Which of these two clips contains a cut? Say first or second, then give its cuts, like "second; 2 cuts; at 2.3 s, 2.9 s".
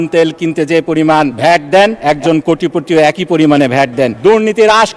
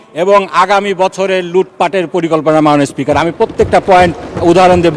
first; 3 cuts; at 1.3 s, 2.0 s, 4.1 s